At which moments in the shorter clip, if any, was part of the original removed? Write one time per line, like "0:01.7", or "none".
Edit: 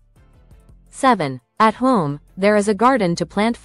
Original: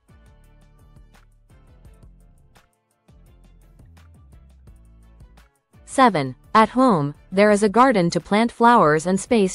0:01.0